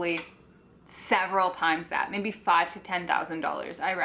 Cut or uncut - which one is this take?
uncut